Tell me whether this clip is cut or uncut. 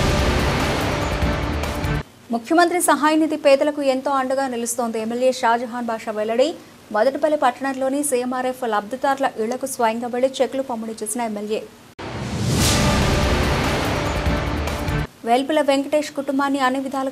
cut